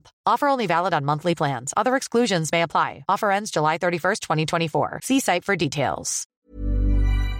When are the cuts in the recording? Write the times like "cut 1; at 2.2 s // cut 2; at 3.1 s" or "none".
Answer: cut 1; at 6.4 s